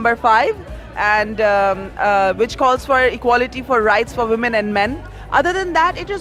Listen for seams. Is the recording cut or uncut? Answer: uncut